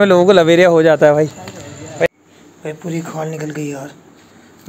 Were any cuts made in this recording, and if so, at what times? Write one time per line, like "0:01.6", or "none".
0:02.1